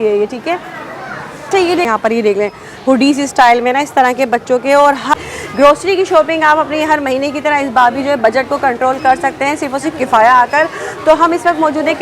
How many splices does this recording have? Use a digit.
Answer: 2